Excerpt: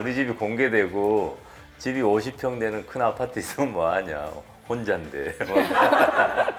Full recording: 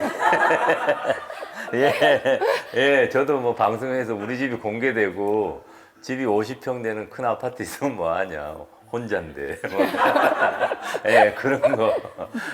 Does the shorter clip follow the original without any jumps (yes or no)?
yes